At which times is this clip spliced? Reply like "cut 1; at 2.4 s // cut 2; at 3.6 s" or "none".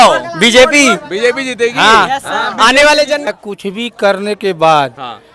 cut 1; at 3.3 s